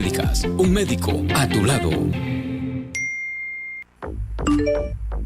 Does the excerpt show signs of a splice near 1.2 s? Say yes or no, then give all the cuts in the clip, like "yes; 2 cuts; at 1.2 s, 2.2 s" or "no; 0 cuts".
no; 1 cut; at 2.8 s